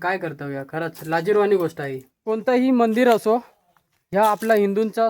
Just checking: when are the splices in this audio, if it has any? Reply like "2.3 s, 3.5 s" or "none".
2.4 s